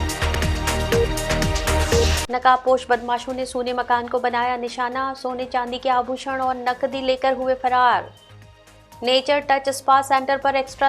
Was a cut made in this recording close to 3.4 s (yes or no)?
no